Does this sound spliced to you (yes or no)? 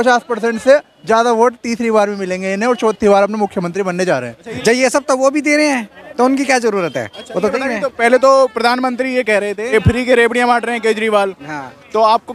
yes